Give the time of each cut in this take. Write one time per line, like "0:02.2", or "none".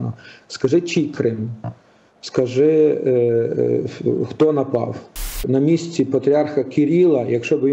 0:05.4